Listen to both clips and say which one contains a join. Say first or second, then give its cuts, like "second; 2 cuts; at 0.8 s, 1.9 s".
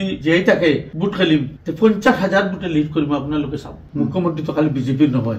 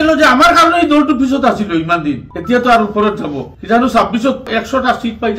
first; 1 cut; at 3.8 s